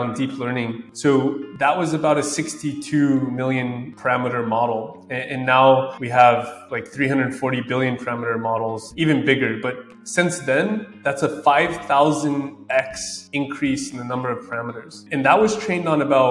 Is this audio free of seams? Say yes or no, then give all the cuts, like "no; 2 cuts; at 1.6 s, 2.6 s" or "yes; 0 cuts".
no; 1 cut; at 8.9 s